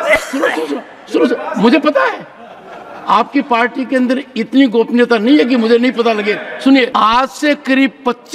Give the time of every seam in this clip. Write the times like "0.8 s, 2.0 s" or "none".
6.9 s